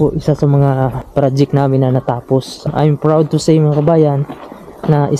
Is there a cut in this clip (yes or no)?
yes